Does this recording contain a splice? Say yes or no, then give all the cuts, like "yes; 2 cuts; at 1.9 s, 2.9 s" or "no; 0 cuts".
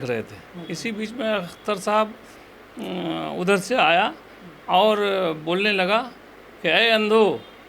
no; 0 cuts